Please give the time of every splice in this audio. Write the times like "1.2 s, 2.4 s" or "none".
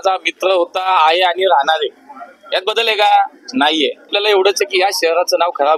4.1 s